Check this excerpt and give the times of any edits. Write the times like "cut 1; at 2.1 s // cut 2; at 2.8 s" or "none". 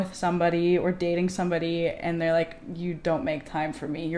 none